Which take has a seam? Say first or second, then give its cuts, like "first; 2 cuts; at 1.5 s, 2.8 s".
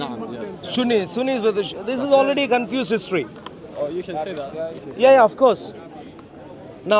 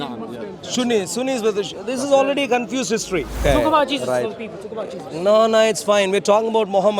second; 1 cut; at 3.4 s